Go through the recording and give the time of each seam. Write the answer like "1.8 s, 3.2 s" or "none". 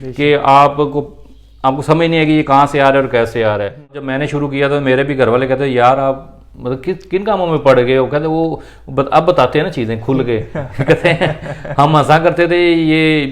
4.0 s